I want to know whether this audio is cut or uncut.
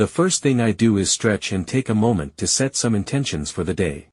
cut